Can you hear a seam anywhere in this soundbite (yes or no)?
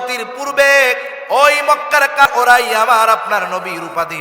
yes